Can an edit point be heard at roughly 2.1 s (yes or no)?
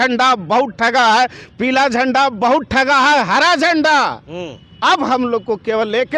no